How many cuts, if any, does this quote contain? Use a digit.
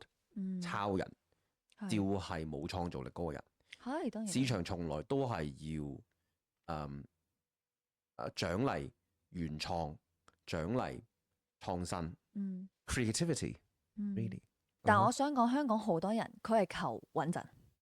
1